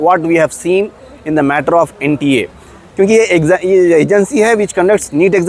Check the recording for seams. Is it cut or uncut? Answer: uncut